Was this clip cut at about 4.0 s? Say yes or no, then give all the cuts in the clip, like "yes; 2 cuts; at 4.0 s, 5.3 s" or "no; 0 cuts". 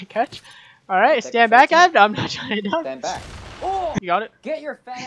yes; 1 cut; at 4.0 s